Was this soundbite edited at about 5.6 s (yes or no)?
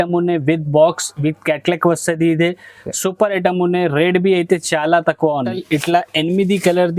yes